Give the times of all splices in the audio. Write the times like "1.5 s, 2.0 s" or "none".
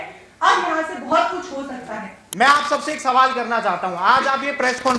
2.2 s